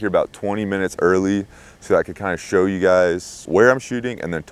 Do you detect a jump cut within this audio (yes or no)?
no